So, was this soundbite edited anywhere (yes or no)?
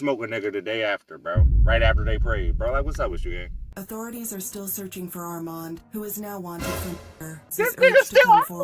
yes